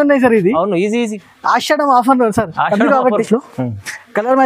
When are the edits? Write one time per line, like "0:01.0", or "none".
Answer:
0:03.3